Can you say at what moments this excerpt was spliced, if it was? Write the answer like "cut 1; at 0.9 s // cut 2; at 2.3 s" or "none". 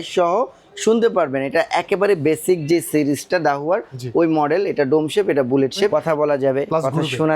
cut 1; at 5.9 s